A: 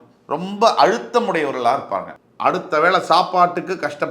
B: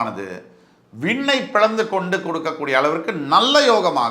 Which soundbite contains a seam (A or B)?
A